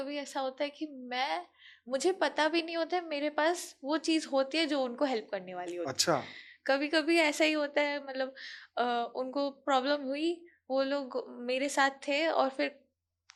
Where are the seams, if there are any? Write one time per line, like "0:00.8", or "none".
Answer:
none